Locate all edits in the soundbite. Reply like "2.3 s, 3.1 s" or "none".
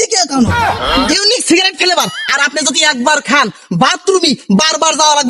1.1 s